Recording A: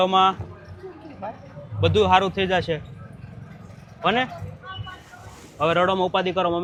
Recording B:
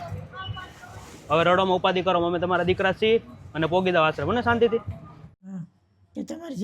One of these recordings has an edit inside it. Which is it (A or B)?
B